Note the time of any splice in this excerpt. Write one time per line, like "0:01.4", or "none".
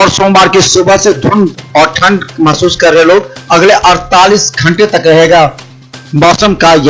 none